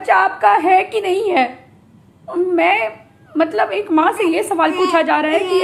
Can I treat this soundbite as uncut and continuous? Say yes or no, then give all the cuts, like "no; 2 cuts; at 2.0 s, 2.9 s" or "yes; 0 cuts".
yes; 0 cuts